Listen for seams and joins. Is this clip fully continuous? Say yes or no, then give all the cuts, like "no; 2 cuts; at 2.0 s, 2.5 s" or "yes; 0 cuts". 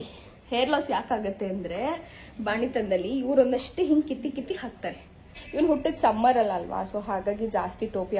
no; 1 cut; at 5.4 s